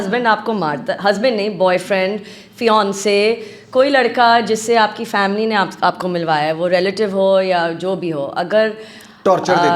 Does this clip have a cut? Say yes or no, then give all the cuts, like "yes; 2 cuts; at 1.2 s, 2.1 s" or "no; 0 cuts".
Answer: no; 0 cuts